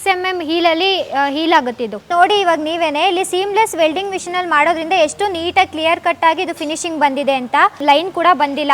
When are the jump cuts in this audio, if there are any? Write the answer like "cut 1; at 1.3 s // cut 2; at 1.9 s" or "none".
cut 1; at 2.1 s // cut 2; at 7.8 s